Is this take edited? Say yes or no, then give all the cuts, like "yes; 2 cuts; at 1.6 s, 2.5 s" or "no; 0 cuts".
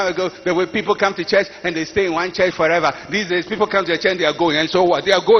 no; 0 cuts